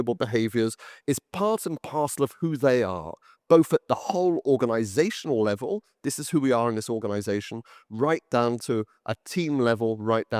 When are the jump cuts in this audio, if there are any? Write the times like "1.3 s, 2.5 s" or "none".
none